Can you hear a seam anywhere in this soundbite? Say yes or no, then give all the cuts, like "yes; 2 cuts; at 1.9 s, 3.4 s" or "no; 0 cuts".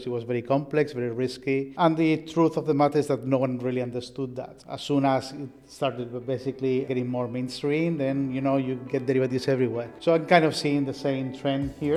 no; 0 cuts